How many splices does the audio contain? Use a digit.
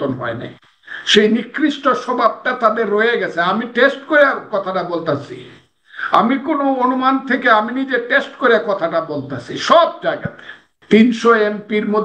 1